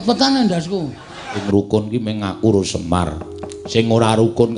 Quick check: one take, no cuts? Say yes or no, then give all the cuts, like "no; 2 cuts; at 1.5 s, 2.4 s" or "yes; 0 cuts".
no; 1 cut; at 1.4 s